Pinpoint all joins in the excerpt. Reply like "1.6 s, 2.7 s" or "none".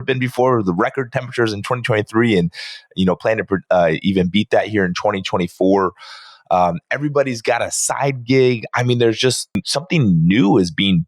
9.6 s